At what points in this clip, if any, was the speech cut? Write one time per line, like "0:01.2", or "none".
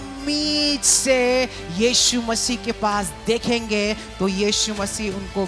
none